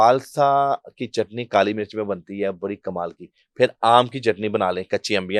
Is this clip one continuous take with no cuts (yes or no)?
yes